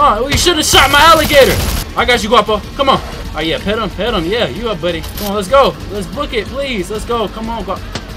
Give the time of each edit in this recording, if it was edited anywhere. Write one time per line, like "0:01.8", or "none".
0:01.8
0:03.2
0:05.1